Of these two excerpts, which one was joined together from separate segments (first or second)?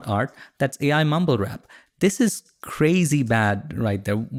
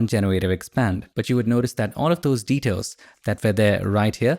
second